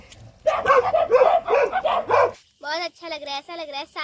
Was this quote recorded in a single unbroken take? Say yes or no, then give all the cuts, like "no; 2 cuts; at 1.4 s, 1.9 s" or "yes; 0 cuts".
no; 1 cut; at 2.4 s